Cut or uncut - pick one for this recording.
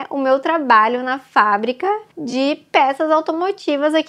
uncut